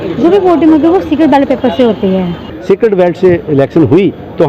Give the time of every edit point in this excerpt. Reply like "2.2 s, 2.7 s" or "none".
2.5 s